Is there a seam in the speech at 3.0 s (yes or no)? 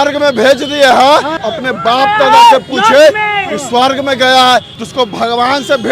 no